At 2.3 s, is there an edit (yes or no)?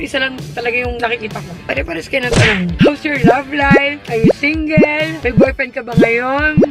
no